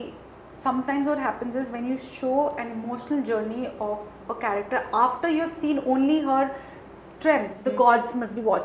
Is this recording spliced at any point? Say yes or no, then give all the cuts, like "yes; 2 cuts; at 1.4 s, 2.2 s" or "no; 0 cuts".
yes; 1 cut; at 7.5 s